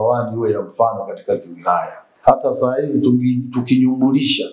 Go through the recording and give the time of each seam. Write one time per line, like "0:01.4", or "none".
0:02.0